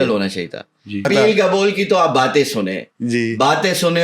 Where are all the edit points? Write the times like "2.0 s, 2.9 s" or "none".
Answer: 1.1 s